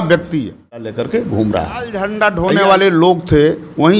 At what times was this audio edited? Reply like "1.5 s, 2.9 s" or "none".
0.8 s, 2.1 s